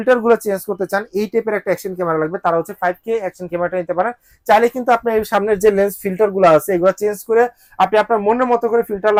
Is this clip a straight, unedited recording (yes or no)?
yes